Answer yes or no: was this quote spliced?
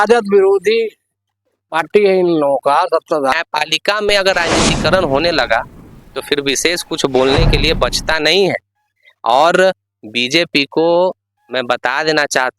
yes